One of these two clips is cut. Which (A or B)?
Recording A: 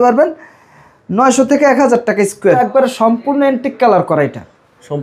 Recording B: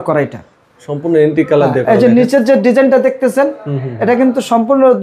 A